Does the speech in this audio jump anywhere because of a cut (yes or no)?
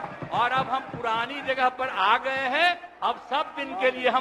no